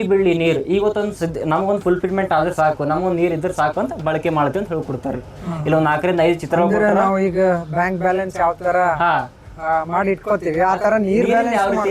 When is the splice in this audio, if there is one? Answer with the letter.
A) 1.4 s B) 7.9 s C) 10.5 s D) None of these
D